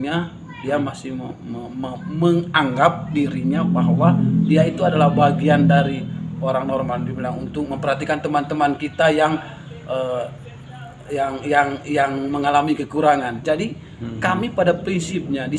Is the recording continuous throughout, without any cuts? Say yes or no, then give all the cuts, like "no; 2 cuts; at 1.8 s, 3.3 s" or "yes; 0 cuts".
yes; 0 cuts